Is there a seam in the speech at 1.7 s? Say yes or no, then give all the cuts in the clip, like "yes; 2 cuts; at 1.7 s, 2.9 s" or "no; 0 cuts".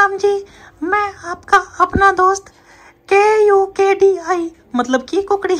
no; 0 cuts